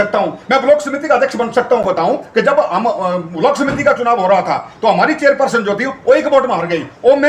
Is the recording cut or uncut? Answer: cut